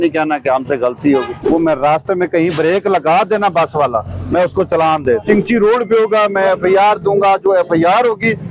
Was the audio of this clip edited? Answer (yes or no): yes